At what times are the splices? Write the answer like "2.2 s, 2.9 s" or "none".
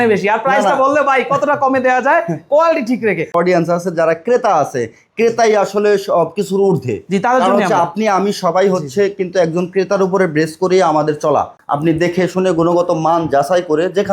3.3 s, 11.6 s